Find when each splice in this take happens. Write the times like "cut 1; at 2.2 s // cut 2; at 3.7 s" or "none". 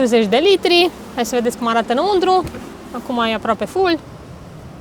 none